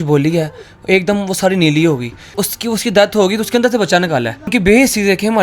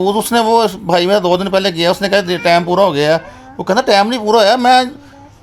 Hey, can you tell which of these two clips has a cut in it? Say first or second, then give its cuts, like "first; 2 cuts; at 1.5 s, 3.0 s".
first; 2 cuts; at 2.4 s, 4.5 s